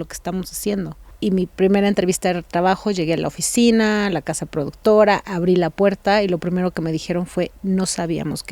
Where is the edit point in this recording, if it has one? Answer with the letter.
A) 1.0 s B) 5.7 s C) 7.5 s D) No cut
A